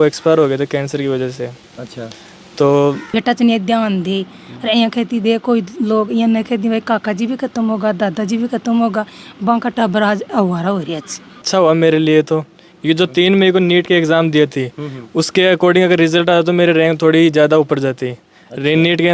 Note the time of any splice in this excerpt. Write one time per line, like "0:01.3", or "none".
0:03.1
0:11.5